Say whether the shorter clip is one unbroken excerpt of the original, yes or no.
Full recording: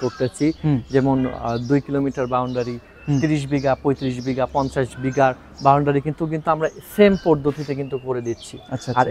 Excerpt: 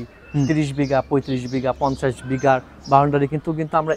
yes